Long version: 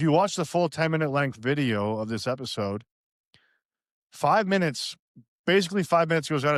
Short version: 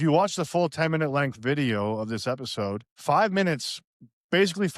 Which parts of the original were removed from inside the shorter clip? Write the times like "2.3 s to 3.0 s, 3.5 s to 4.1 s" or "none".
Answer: 2.9 s to 4.0 s